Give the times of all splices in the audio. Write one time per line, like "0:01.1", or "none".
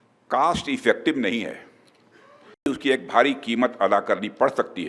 0:02.7